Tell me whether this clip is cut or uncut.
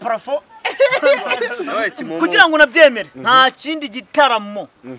cut